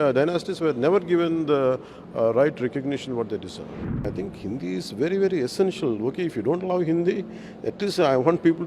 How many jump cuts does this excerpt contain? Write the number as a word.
one